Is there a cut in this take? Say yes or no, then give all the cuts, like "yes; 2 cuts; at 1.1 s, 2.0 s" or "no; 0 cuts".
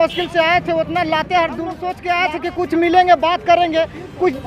yes; 1 cut; at 1.9 s